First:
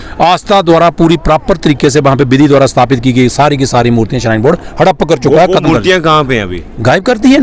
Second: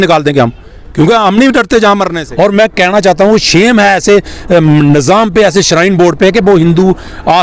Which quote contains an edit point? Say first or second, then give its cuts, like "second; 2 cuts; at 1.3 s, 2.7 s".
second; 1 cut; at 2.1 s